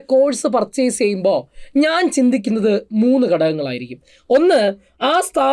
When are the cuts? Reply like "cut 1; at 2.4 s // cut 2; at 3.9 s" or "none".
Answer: none